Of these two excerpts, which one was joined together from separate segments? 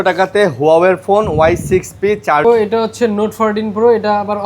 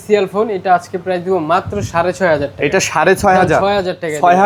first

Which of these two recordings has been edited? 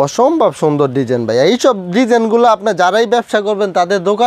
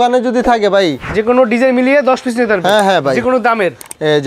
second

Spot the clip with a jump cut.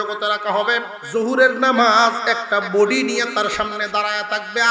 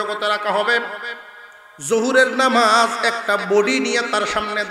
first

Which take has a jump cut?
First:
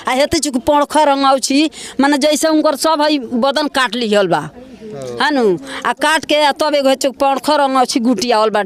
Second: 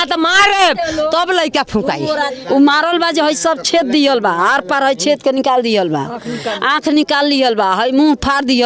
second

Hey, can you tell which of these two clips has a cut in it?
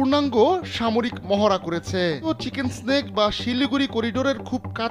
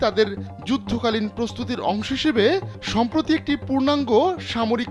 first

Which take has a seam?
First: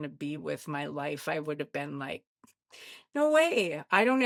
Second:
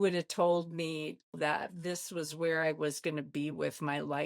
second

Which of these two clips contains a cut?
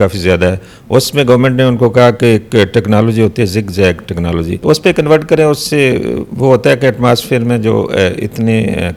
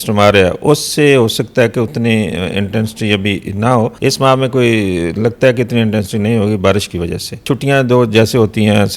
second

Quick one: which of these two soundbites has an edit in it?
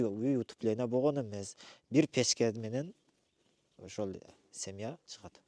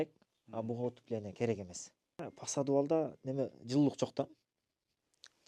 second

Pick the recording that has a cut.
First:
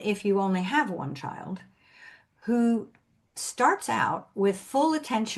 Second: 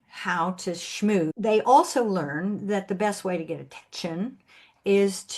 second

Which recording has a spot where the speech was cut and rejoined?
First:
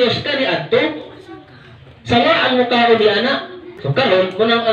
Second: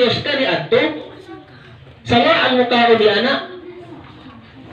first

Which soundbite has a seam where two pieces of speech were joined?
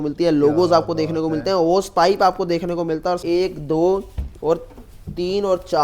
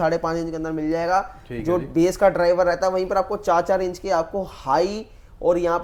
first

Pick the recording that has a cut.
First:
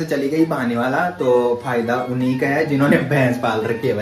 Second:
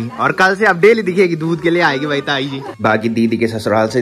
second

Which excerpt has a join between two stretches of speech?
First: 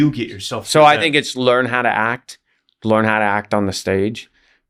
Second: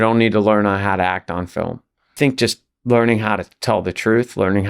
second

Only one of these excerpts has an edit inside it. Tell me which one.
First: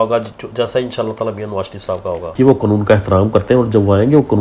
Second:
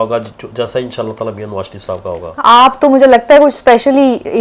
first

